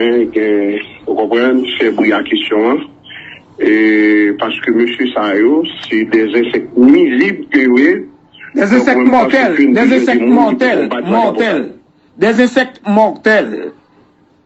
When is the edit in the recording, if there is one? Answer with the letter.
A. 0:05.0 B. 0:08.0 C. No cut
C